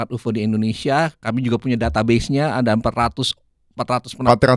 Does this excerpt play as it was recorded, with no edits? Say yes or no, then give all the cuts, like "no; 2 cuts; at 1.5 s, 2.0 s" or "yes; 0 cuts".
yes; 0 cuts